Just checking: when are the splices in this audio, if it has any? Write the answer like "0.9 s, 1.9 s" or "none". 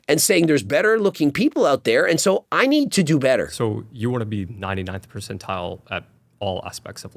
3.5 s